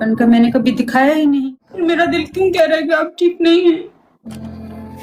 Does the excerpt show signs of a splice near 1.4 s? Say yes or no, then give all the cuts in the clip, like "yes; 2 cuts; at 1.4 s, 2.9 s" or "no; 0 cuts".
yes; 1 cut; at 1.4 s